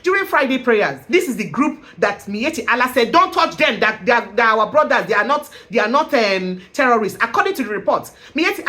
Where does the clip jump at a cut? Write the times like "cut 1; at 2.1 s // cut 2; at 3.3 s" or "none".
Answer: cut 1; at 1.0 s